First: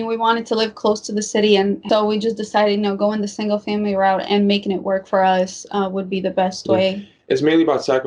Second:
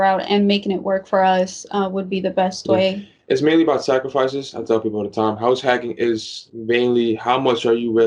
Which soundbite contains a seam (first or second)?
first